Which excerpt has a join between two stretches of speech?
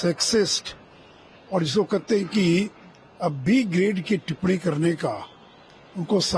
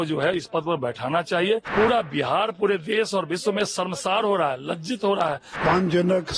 second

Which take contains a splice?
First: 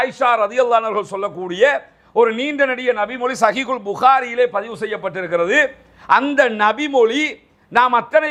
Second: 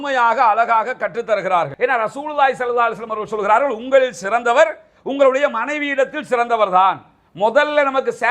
second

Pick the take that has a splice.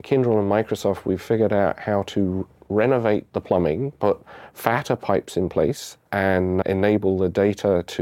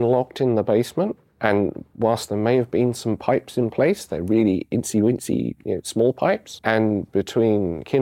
first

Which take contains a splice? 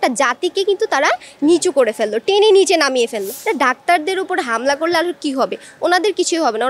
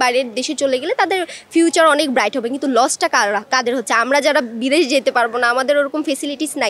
first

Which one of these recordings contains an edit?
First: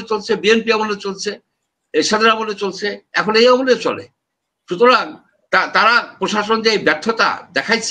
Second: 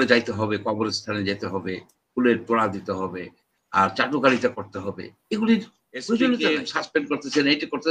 second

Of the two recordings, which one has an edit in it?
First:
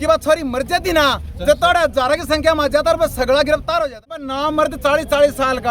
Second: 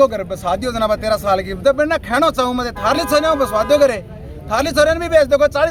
first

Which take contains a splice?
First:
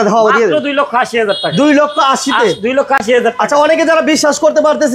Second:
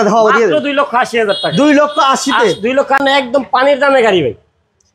second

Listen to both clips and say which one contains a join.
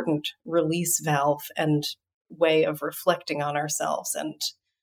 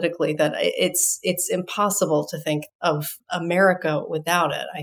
second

